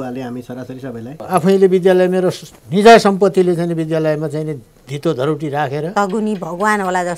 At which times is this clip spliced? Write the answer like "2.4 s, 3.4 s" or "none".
1.2 s, 5.9 s